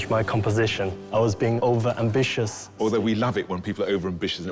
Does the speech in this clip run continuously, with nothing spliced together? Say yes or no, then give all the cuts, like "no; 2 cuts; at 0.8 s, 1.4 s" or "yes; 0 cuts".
no; 2 cuts; at 1.2 s, 2.7 s